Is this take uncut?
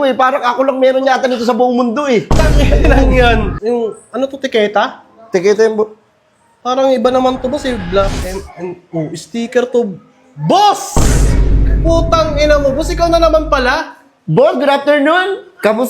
no; 1 cut; at 3.5 s

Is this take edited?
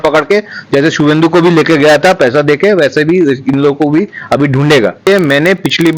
yes; 1 cut; at 5.1 s

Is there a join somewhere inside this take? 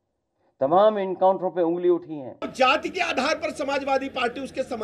yes; 1 cut; at 2.5 s

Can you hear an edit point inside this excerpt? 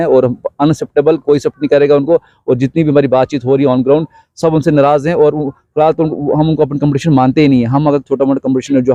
no; 0 cuts

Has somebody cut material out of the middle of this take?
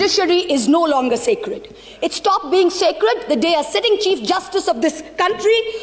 no; 0 cuts

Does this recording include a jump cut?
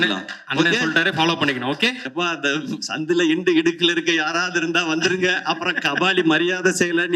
yes; 1 cut; at 2.0 s

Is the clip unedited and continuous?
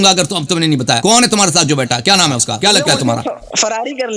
no; 2 cuts; at 1.0 s, 2.5 s

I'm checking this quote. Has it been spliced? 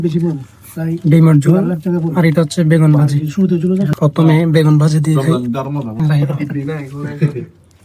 yes; 2 cuts; at 3.9 s, 6.0 s

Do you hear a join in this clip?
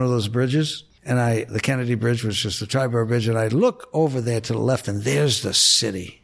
yes; 1 cut; at 1.5 s

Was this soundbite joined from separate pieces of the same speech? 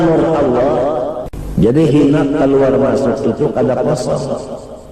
yes; 1 cut; at 1.3 s

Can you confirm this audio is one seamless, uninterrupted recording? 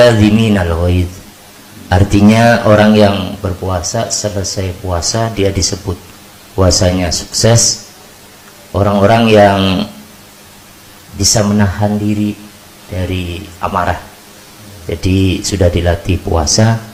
yes; 0 cuts

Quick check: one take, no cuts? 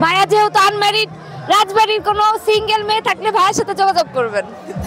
yes; 0 cuts

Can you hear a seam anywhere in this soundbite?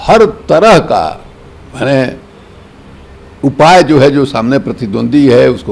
no; 0 cuts

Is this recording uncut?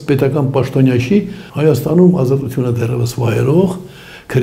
no; 1 cut; at 1.4 s

